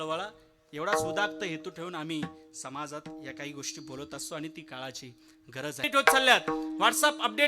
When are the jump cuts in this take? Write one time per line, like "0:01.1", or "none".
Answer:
0:05.8